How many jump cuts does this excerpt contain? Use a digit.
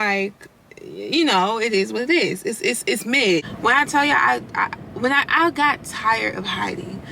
1